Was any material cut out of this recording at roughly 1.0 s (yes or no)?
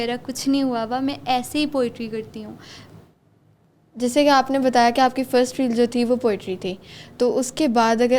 no